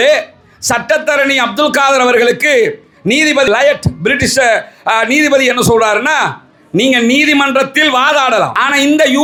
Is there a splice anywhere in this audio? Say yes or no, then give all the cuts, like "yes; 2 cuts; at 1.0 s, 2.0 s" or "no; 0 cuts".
no; 0 cuts